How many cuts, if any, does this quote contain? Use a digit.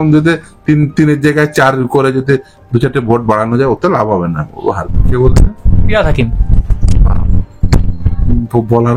1